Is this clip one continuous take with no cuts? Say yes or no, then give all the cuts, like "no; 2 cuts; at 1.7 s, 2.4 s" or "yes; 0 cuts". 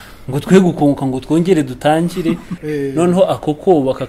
no; 1 cut; at 2.6 s